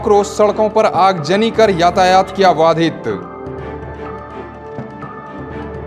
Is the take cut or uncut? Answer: uncut